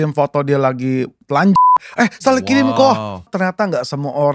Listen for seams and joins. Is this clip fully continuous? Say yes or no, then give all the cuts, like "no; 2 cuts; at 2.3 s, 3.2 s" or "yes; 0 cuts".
no; 2 cuts; at 1.6 s, 3.3 s